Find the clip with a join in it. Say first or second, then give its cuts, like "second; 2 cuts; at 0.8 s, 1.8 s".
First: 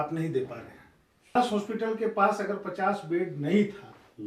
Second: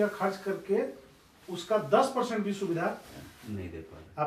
first; 1 cut; at 1.4 s